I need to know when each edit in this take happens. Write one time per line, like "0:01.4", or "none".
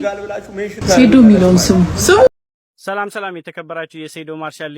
0:02.3